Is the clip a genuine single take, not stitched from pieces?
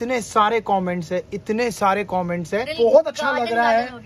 no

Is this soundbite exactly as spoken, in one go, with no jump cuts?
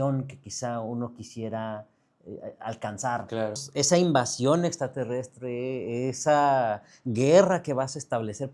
no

